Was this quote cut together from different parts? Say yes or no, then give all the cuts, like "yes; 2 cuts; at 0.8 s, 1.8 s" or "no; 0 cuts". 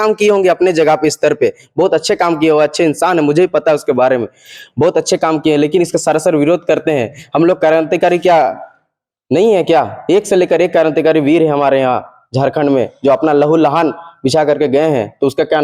no; 0 cuts